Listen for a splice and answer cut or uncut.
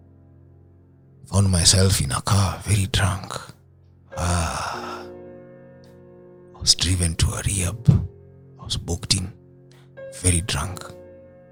uncut